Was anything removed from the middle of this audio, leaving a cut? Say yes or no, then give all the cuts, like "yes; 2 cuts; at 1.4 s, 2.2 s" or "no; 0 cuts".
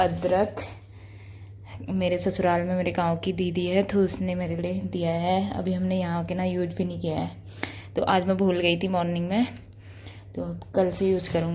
no; 0 cuts